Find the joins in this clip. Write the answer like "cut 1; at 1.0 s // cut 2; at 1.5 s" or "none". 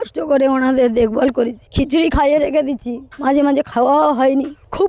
cut 1; at 1.6 s